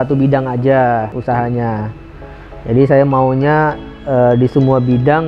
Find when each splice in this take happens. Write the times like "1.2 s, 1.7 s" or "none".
1.1 s

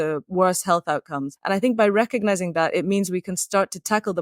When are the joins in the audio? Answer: 1.3 s

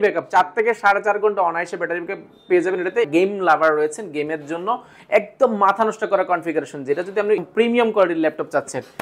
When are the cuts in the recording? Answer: 3.1 s, 7.4 s

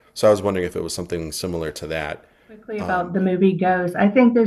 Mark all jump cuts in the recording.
2.8 s

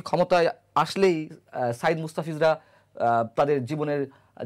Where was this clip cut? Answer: none

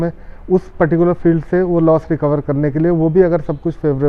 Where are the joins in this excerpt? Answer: none

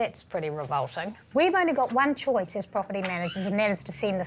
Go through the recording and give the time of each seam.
1.2 s

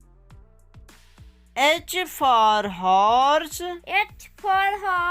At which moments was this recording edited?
1.5 s

